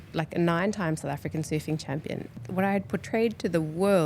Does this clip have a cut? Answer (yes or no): yes